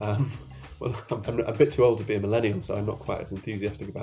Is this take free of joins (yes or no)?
no